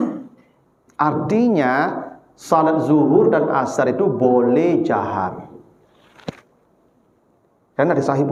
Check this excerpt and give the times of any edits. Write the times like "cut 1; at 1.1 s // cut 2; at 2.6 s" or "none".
none